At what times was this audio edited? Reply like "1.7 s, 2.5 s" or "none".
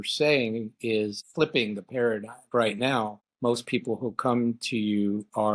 1.2 s, 2.5 s, 3.2 s